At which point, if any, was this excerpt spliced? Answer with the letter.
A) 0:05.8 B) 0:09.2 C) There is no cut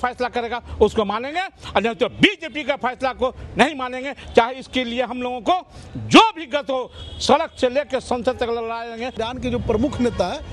B